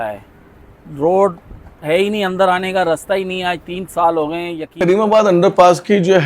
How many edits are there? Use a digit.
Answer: 1